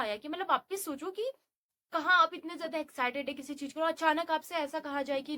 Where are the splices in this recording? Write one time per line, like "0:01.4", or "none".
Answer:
none